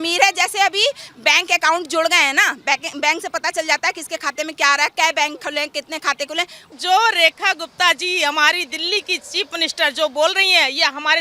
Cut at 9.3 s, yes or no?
no